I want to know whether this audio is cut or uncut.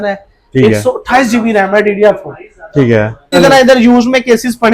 cut